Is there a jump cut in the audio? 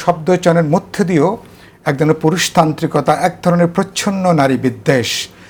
no; 0 cuts

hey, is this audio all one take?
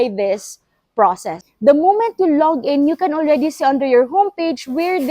no; 1 cut; at 1.4 s

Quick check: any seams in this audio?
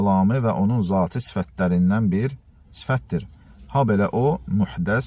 no; 0 cuts

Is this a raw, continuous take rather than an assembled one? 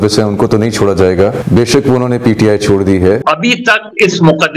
no; 2 cuts; at 1.4 s, 3.2 s

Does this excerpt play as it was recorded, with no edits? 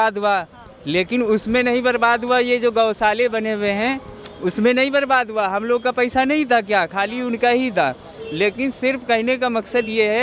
yes; 0 cuts

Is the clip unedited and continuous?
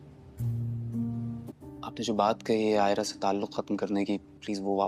no; 1 cut; at 1.4 s

